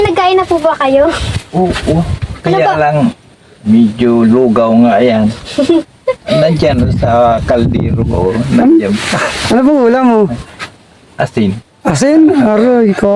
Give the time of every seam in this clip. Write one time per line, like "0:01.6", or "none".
none

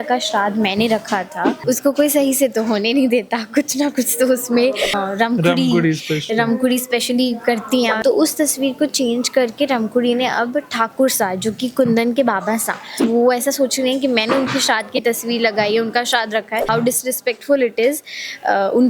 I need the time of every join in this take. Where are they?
0:01.5
0:04.9
0:07.9
0:13.0
0:16.7

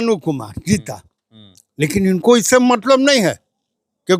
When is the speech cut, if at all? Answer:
none

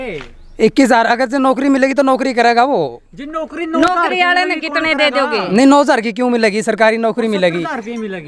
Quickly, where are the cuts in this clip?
none

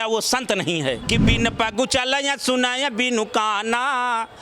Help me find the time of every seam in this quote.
0:01.0

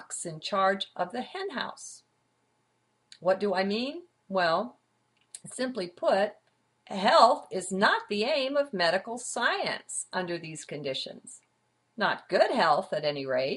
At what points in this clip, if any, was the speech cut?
none

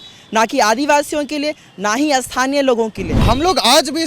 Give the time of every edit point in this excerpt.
0:03.2

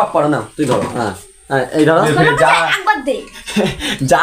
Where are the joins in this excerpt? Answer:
0:02.0

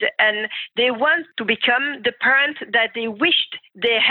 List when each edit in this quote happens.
0:01.3

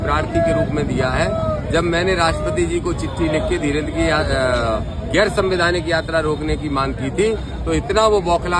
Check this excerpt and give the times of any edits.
none

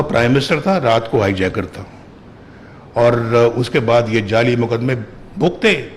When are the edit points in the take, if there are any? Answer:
none

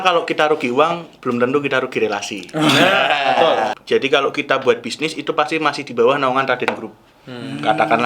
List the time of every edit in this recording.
0:03.7

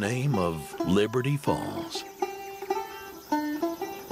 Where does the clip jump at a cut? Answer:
0:02.8

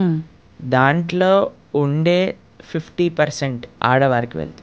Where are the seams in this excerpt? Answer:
0:03.6

